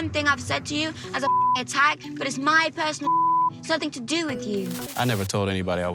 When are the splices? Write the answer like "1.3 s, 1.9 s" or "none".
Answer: 4.9 s